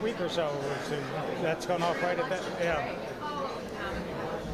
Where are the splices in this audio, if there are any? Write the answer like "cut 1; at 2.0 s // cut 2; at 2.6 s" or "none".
none